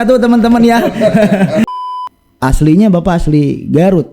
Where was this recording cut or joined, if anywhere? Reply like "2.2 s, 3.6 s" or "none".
1.8 s